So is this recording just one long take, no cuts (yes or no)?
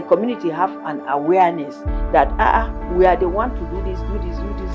yes